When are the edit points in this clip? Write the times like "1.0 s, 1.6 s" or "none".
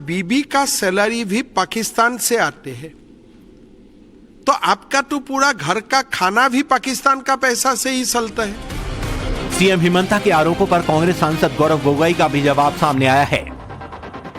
5.2 s